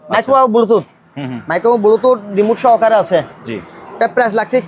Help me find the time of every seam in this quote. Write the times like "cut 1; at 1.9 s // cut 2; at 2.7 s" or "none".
none